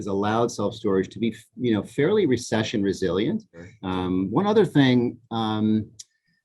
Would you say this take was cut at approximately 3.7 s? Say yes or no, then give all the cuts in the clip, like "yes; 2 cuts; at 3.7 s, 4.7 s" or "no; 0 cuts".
yes; 1 cut; at 3.7 s